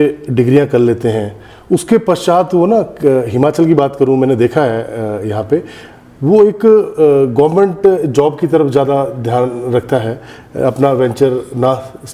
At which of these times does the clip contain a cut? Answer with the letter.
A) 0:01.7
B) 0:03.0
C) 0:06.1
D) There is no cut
D